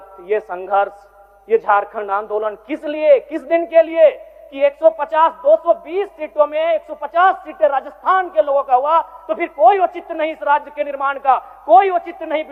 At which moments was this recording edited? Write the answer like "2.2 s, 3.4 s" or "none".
none